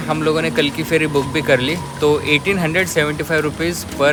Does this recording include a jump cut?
no; 0 cuts

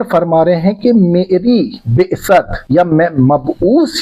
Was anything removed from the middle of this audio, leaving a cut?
yes; 1 cut; at 2.6 s

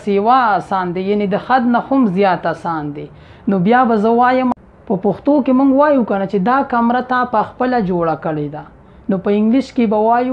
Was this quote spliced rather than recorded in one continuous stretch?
yes; 1 cut; at 4.5 s

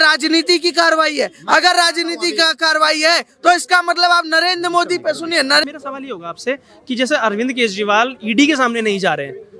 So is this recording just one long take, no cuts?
no; 1 cut; at 5.6 s

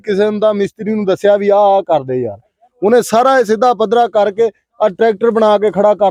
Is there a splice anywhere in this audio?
no; 0 cuts

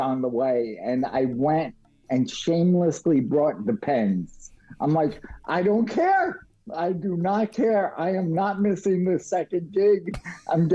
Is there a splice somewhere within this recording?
no; 0 cuts

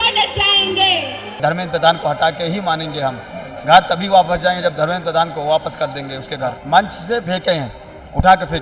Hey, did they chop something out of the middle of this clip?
yes; 2 cuts; at 1.2 s, 6.6 s

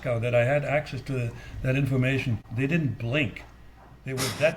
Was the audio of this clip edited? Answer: yes; 1 cut; at 2.4 s

